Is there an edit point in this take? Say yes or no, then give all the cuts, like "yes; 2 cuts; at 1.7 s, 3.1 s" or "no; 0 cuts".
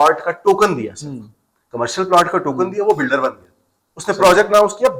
no; 0 cuts